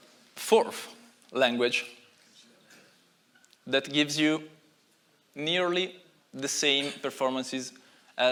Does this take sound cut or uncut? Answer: uncut